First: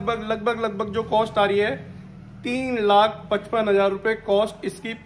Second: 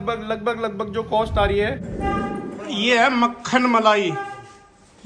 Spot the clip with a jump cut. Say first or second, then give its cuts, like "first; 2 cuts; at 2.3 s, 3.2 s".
second; 1 cut; at 1.9 s